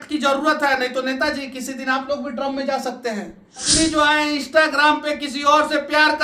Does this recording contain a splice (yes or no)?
yes